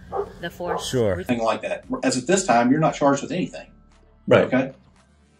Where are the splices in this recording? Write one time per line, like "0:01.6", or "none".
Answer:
0:01.2

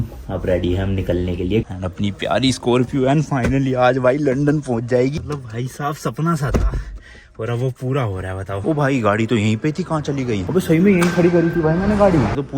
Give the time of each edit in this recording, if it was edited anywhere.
0:01.7
0:05.2
0:08.6

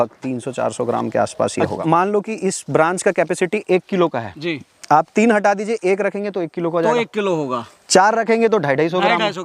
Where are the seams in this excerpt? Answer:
0:01.7

